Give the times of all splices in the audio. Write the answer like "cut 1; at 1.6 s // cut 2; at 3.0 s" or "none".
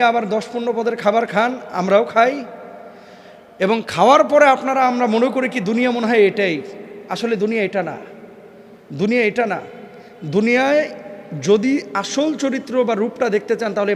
none